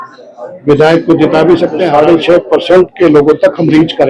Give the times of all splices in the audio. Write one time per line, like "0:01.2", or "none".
0:01.9